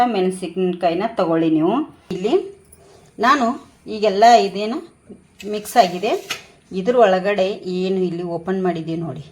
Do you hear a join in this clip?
yes; 1 cut; at 2.2 s

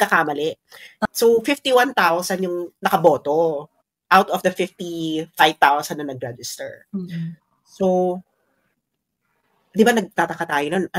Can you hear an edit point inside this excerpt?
yes; 1 cut; at 1.0 s

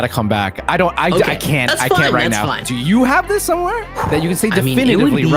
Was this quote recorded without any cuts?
no; 2 cuts; at 2.6 s, 3.9 s

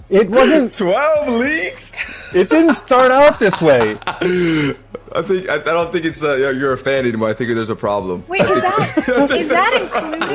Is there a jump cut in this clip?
no; 0 cuts

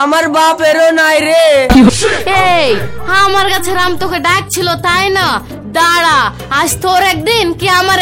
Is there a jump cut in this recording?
yes; 1 cut; at 1.9 s

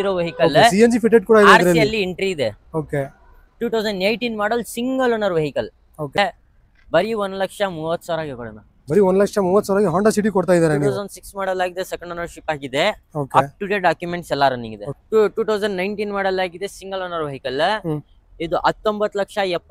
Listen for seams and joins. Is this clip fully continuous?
no; 2 cuts; at 6.2 s, 14.9 s

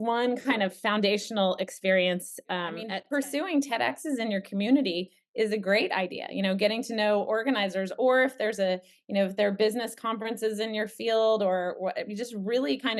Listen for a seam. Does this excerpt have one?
yes; 1 cut; at 2.9 s

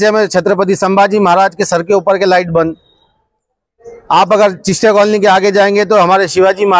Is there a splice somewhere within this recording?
no; 0 cuts

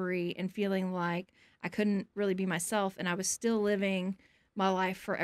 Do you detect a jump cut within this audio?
no; 0 cuts

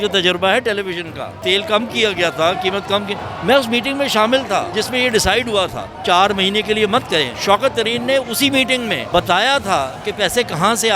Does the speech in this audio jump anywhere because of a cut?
yes; 5 cuts; at 1.4 s, 4.7 s, 5.9 s, 7.3 s, 9.0 s

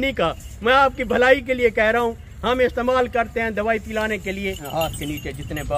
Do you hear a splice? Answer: yes; 1 cut; at 4.6 s

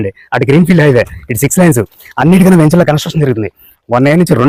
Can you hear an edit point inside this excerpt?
no; 0 cuts

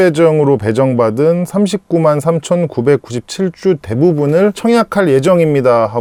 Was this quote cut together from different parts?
no; 0 cuts

